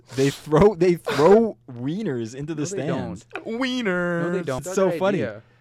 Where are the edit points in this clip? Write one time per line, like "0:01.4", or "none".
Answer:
0:04.7

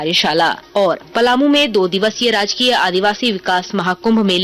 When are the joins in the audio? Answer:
0:01.1

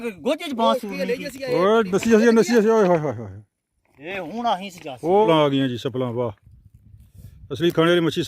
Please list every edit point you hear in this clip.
0:05.3

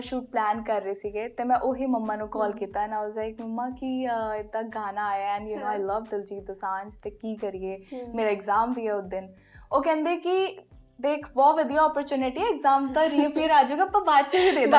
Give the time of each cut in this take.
none

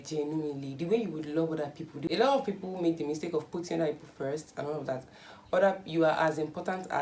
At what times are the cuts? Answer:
0:02.1

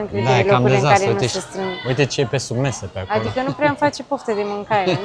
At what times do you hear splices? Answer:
none

